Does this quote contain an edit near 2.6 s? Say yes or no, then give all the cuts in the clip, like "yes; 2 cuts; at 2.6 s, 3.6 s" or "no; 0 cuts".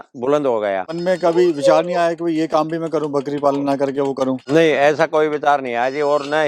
no; 2 cuts; at 0.9 s, 4.4 s